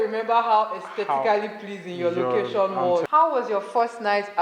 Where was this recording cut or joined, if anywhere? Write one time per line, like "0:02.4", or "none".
0:03.0